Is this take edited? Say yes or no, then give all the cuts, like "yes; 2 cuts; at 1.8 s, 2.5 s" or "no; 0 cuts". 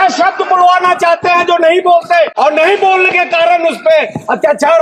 yes; 1 cut; at 2.3 s